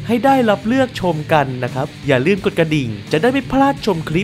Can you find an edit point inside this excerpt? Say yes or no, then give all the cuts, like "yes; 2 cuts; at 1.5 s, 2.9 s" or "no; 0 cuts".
yes; 2 cuts; at 1.9 s, 3.0 s